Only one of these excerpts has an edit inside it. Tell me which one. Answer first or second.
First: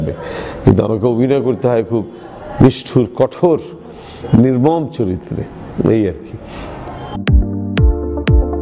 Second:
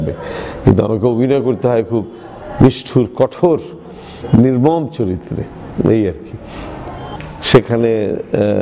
second